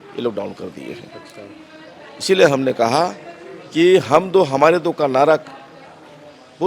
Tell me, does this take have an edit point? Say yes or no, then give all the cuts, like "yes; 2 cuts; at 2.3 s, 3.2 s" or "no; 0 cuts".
no; 0 cuts